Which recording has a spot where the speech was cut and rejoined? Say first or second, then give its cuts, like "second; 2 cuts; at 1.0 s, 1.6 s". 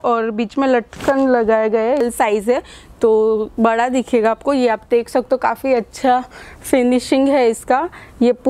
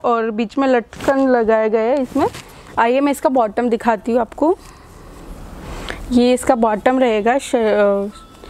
first; 1 cut; at 2.0 s